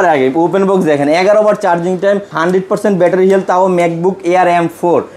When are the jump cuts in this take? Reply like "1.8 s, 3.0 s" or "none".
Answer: 2.3 s